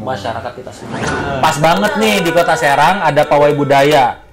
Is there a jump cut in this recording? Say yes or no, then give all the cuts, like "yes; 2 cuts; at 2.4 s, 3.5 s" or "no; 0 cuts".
yes; 1 cut; at 1.0 s